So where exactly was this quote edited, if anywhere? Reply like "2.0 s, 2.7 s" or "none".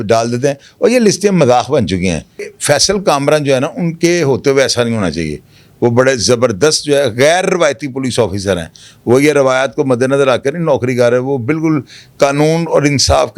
2.5 s